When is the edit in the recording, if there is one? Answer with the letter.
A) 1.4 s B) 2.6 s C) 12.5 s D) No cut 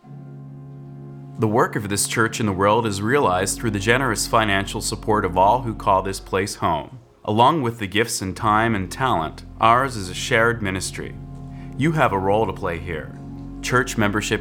A